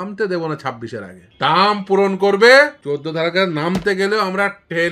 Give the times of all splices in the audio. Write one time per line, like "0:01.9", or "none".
0:01.2
0:02.8